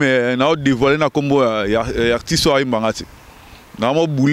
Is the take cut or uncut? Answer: uncut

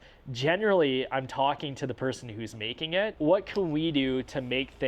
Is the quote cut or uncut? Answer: cut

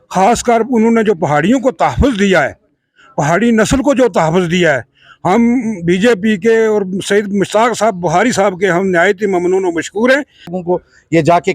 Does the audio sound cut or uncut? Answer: cut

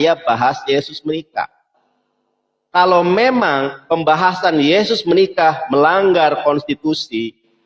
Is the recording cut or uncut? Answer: uncut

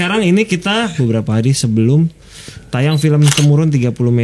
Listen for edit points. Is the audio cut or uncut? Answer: cut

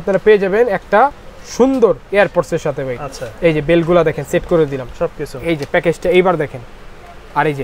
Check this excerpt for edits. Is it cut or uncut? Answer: uncut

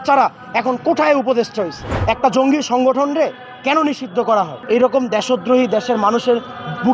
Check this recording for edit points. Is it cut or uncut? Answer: cut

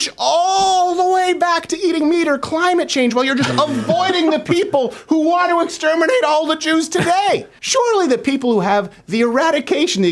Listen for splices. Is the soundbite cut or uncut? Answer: cut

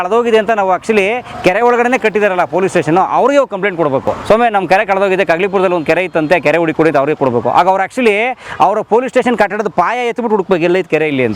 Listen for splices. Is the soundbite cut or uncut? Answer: uncut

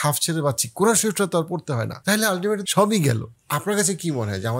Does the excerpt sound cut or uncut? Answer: cut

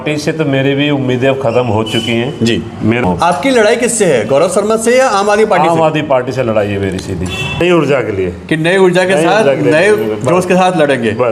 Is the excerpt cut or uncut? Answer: cut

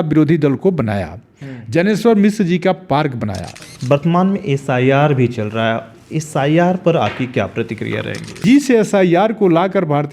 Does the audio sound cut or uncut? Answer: cut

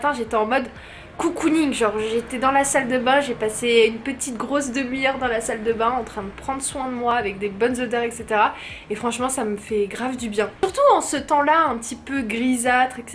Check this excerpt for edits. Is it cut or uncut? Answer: uncut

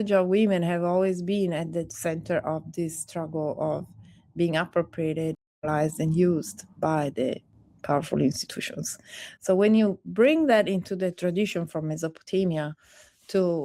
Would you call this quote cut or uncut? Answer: cut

